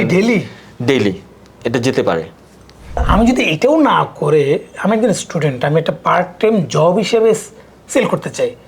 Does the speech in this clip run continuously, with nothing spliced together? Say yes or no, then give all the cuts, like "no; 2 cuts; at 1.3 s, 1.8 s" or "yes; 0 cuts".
no; 1 cut; at 3.0 s